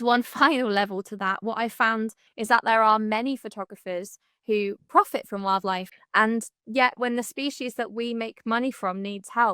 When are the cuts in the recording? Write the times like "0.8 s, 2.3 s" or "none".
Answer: 2.2 s, 5.9 s